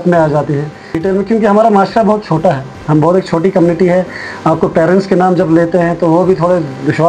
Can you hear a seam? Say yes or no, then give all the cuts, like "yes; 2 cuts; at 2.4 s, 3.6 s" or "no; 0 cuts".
yes; 1 cut; at 1.0 s